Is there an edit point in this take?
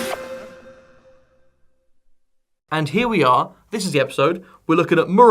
yes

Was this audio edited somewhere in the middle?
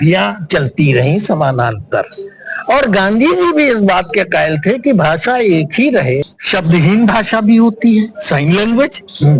yes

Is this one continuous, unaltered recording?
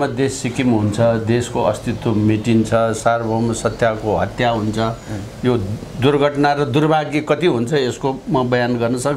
yes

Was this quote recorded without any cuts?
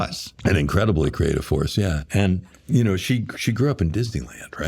yes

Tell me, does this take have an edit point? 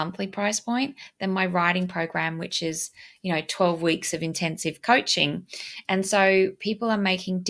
no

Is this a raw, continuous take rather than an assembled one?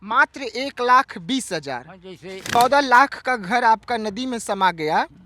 no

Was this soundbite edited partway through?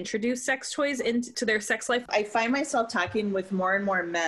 yes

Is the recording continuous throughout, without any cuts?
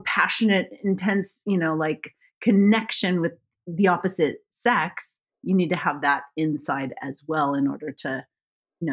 yes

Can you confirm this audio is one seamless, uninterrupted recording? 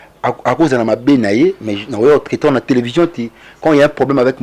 yes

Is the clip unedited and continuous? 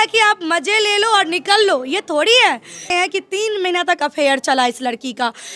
no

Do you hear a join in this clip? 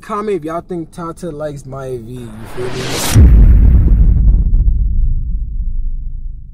no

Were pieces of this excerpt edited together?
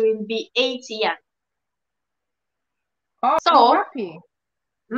yes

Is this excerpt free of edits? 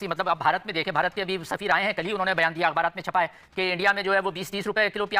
yes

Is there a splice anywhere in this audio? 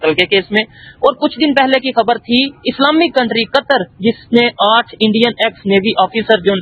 no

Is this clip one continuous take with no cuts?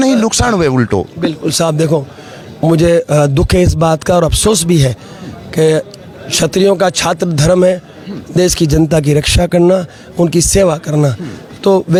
yes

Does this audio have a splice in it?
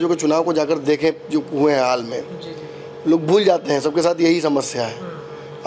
no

